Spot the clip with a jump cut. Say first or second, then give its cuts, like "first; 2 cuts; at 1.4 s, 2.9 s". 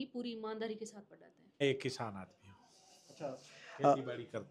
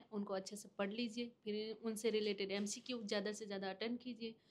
first; 1 cut; at 1.6 s